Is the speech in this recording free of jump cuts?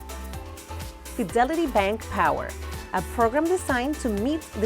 no; 1 cut; at 1.1 s

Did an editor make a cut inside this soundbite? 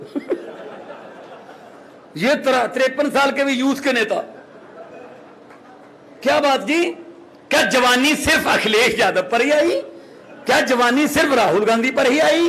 no; 0 cuts

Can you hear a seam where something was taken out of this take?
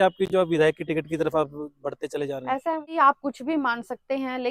no; 0 cuts

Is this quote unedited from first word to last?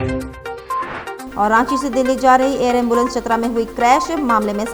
yes; 0 cuts

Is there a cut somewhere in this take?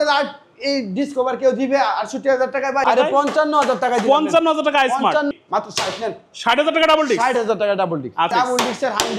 yes; 3 cuts; at 2.8 s, 5.3 s, 8.3 s

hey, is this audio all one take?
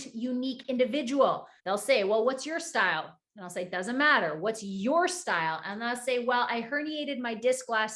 no; 1 cut; at 1.5 s

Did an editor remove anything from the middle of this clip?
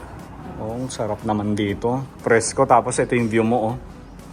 no; 0 cuts

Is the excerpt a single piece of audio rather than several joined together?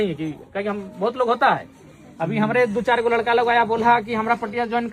yes; 0 cuts

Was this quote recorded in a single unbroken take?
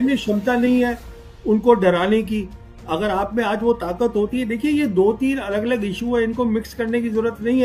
yes; 0 cuts

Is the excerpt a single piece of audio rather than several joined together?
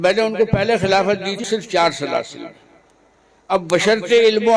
no; 1 cut; at 1.4 s

